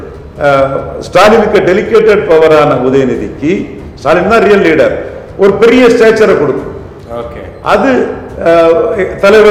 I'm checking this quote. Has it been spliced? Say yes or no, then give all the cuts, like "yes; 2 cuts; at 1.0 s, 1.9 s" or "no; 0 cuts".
no; 0 cuts